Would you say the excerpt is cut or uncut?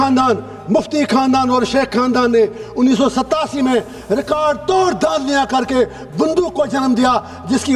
uncut